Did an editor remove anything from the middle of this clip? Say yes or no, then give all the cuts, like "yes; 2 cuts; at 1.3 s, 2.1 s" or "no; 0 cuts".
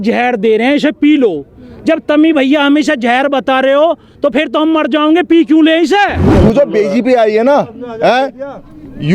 yes; 1 cut; at 6.2 s